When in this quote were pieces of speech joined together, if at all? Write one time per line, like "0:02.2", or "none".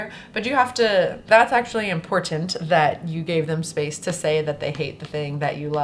0:01.2